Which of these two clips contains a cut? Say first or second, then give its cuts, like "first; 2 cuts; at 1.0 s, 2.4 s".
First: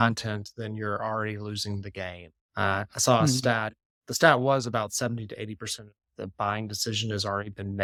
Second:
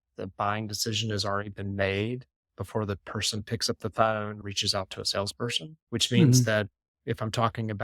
second; 2 cuts; at 4.4 s, 5.7 s